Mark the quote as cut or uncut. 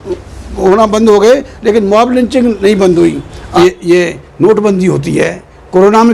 cut